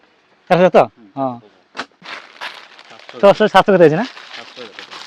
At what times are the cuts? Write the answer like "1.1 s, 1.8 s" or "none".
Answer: 2.1 s